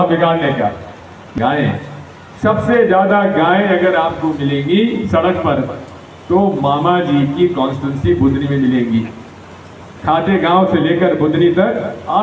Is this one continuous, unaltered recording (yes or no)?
no